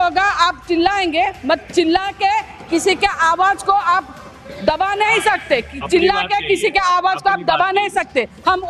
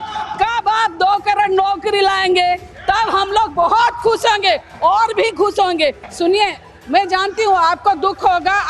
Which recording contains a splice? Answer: second; 1 cut; at 6.0 s

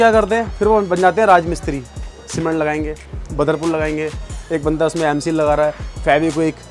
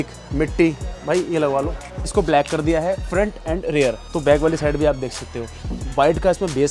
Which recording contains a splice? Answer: second; 3 cuts; at 2.1 s, 4.0 s, 5.7 s

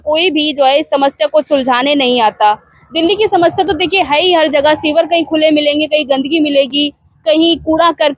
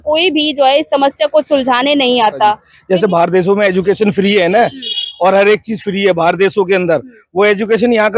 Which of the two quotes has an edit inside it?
second; 1 cut; at 2.7 s

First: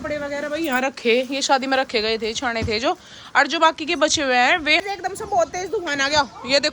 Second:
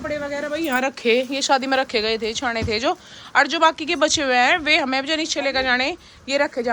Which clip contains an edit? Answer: first; 1 cut; at 4.8 s

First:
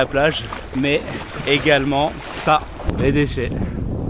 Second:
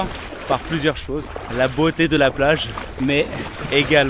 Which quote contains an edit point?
first; 1 cut; at 2.9 s

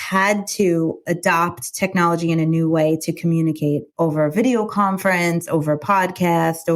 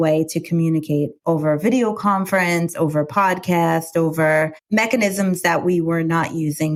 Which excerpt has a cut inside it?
first; 1 cut; at 1.0 s

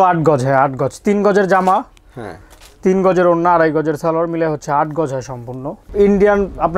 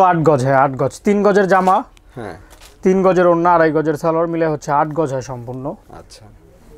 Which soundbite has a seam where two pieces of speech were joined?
first; 1 cut; at 5.8 s

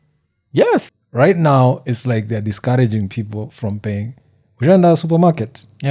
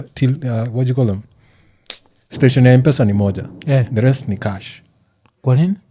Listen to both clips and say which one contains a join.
first; 1 cut; at 1.0 s

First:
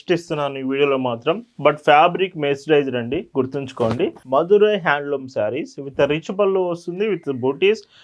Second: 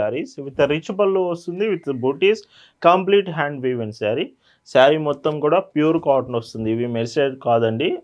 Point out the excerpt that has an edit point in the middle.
first; 1 cut; at 4.2 s

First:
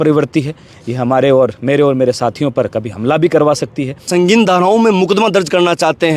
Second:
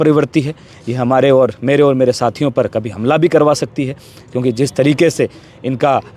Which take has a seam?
first; 1 cut; at 4.1 s

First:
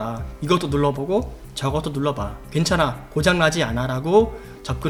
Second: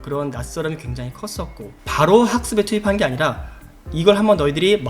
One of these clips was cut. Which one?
second; 1 cut; at 1.9 s

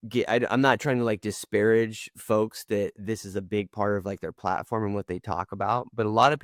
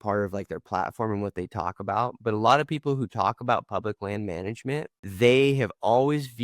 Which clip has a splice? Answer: second; 1 cut; at 5.0 s

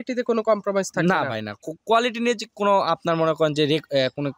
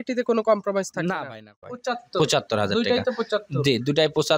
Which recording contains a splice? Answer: second; 1 cut; at 1.8 s

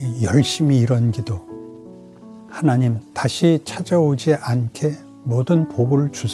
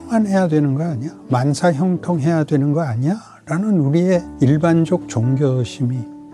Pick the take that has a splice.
second; 1 cut; at 4.3 s

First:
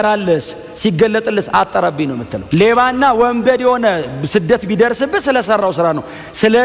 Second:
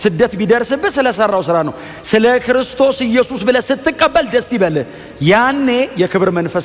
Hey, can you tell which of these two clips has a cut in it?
first; 1 cut; at 2.3 s

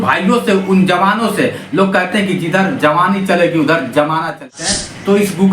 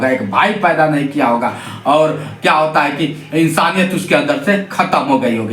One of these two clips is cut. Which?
first; 1 cut; at 4.5 s

